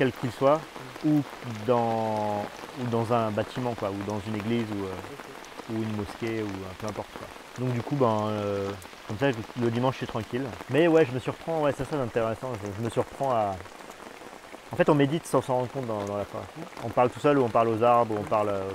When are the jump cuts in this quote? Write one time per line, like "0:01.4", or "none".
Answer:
0:07.4